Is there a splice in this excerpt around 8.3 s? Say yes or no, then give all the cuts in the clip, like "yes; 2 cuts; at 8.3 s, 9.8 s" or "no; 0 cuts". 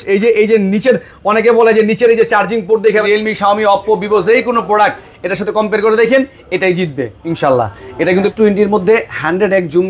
yes; 2 cuts; at 3.0 s, 8.3 s